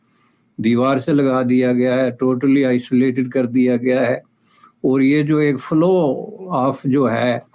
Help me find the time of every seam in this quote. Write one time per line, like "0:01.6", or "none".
none